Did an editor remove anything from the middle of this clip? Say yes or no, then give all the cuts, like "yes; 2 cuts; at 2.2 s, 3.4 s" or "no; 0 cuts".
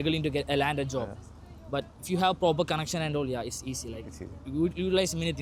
no; 0 cuts